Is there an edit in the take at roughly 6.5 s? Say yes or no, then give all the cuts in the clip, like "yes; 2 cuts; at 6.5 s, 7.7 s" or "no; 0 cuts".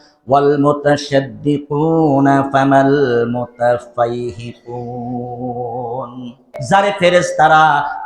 yes; 1 cut; at 6.5 s